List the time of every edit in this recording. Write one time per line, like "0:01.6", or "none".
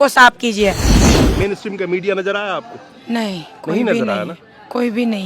0:01.0